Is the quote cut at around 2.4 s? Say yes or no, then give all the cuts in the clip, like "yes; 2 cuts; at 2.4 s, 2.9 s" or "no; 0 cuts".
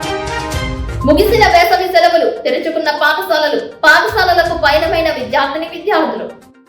no; 1 cut; at 0.9 s